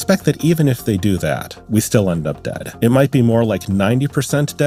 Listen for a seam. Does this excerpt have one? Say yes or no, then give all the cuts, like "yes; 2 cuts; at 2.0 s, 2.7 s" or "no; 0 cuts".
no; 0 cuts